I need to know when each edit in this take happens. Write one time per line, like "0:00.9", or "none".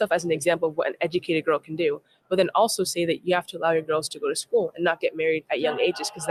none